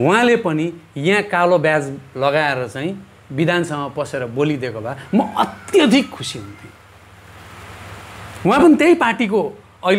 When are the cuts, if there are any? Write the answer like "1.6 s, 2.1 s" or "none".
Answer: none

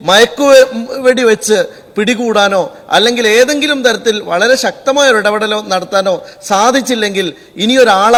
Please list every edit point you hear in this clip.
none

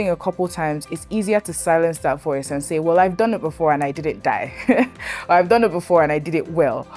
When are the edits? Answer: none

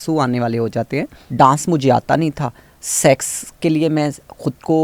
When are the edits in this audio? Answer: 1.2 s

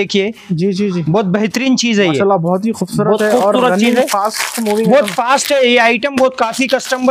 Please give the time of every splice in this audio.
none

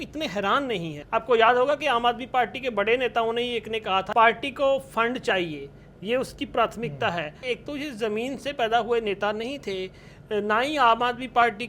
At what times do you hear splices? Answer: 1.0 s, 4.1 s, 7.4 s

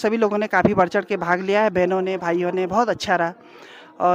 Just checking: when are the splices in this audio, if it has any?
none

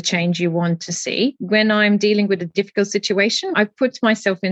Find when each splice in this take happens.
1.4 s, 3.5 s

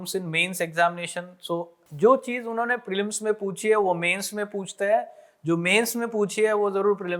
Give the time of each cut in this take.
1.8 s

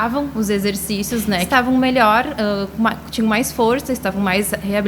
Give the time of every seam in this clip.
1.5 s

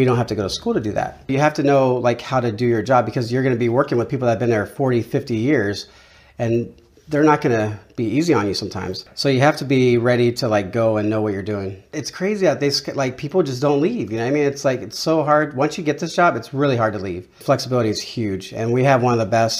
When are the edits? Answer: 1.3 s, 9.0 s, 12.0 s, 17.4 s

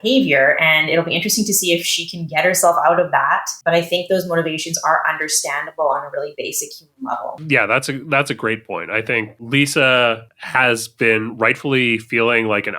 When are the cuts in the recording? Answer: 3.5 s, 7.4 s

